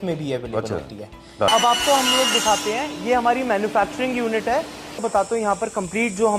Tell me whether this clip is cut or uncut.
cut